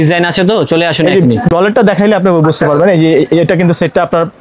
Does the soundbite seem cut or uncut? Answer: uncut